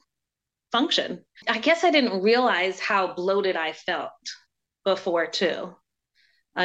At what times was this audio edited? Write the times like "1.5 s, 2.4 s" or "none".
1.4 s